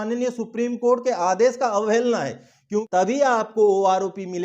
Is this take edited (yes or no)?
yes